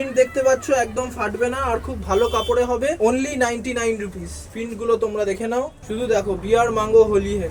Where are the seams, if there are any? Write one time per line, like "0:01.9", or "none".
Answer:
none